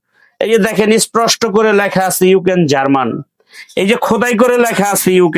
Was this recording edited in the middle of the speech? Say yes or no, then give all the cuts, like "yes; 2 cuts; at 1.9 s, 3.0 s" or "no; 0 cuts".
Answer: no; 0 cuts